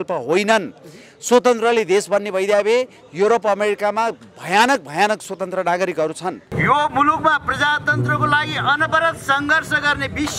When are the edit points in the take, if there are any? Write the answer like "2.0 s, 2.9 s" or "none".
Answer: 6.5 s

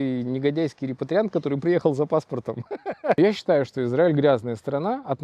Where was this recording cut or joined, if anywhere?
3.2 s

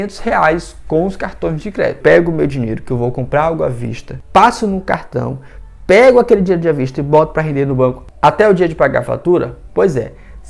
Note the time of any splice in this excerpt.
2.0 s

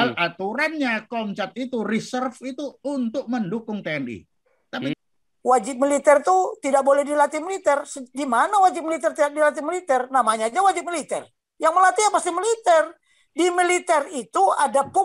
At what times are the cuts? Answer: 4.9 s

